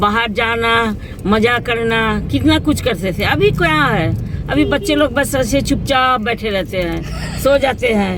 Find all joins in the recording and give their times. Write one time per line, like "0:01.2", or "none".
none